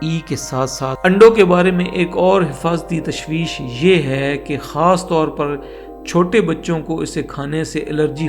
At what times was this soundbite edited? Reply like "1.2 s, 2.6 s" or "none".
1.0 s